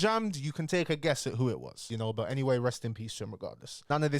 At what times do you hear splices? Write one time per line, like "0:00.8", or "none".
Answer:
0:01.8